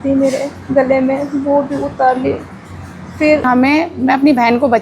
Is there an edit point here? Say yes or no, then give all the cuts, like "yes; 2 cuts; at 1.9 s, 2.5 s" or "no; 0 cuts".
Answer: yes; 1 cut; at 3.4 s